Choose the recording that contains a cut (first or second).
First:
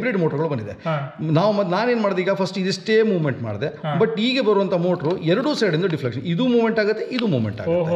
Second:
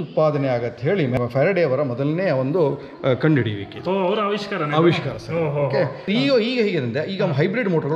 second